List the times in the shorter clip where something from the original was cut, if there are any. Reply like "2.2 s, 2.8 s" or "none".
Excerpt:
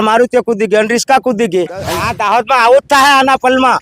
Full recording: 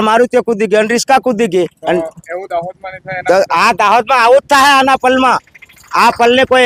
2.0 s